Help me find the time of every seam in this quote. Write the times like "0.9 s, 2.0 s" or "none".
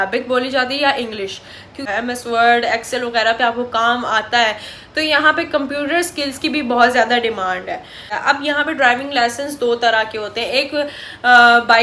1.9 s, 8.1 s